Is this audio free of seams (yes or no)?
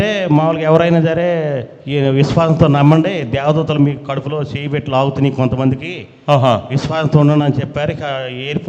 yes